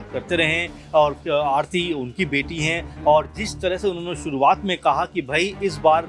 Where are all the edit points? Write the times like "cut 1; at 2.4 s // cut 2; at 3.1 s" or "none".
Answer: none